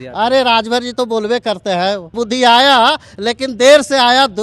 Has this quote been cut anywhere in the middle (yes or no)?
yes